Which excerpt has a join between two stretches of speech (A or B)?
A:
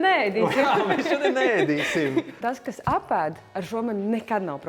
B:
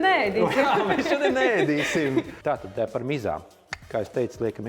A